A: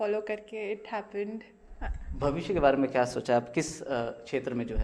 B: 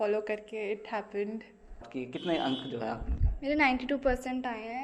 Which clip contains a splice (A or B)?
B